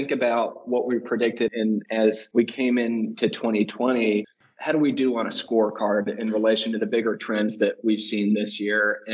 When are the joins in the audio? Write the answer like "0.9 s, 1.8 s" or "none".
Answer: none